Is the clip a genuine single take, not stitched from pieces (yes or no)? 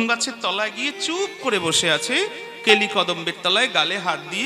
yes